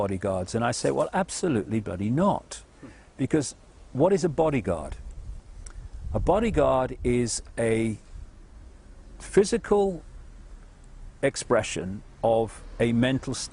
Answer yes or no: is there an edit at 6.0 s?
no